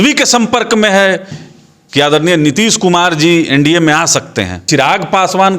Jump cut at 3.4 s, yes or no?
no